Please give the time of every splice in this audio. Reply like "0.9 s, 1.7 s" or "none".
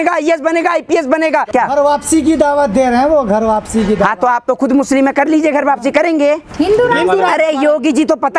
1.5 s, 6.5 s